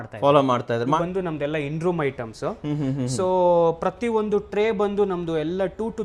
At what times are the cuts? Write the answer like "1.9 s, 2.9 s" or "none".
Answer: 1.0 s